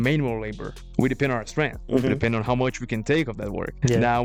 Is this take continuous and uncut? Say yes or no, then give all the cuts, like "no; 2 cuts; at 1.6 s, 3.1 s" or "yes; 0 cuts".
yes; 0 cuts